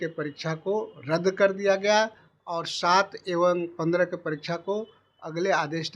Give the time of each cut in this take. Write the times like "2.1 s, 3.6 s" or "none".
none